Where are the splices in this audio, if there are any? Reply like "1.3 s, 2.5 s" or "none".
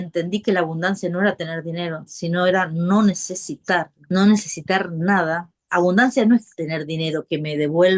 4.0 s, 5.5 s